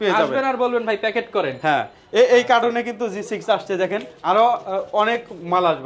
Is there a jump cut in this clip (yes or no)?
no